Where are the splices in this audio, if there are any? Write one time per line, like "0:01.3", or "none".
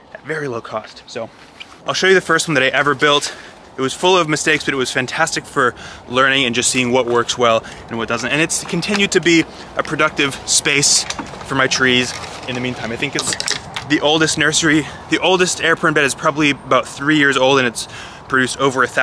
none